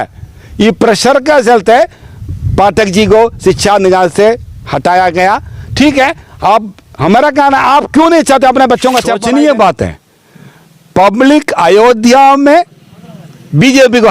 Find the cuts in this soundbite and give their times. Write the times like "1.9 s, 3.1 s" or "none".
9.1 s